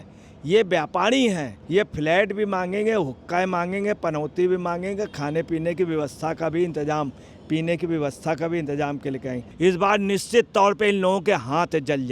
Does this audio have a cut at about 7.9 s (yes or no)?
no